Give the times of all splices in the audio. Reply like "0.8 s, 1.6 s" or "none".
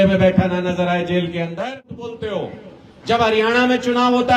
2.1 s